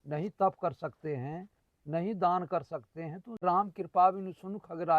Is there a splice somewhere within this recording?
yes; 1 cut; at 3.4 s

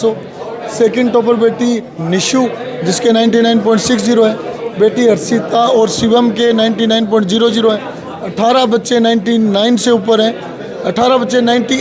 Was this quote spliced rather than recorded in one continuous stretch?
no; 0 cuts

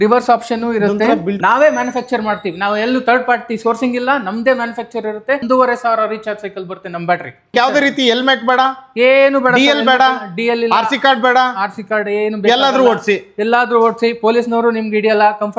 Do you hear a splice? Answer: yes; 3 cuts; at 1.4 s, 5.4 s, 7.5 s

